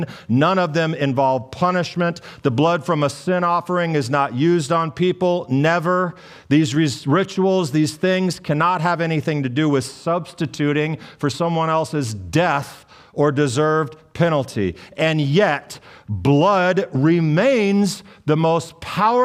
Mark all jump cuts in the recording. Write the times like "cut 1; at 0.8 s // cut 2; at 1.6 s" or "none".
none